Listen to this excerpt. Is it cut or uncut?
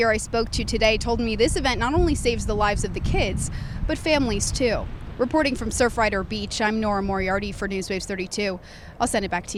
uncut